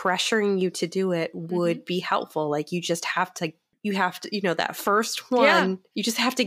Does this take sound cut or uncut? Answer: cut